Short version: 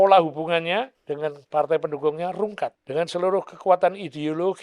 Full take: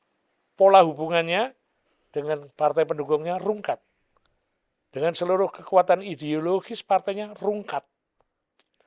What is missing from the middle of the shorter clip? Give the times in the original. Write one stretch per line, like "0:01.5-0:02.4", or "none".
0:01.6-0:02.1
0:03.9-0:04.9